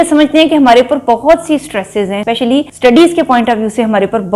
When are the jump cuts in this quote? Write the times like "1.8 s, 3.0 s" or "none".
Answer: 2.4 s

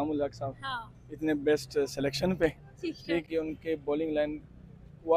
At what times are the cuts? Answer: 3.3 s

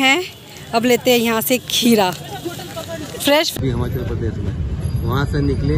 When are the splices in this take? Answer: 3.5 s

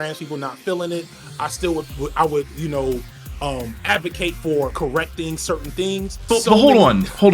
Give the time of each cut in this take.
6.3 s

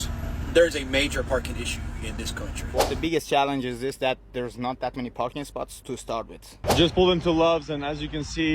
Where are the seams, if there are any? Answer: 2.6 s, 6.5 s

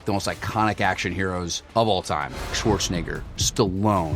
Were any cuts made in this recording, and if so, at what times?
1.6 s

